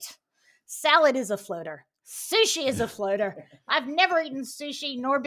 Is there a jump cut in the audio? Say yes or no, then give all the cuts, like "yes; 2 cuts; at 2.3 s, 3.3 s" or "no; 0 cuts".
no; 0 cuts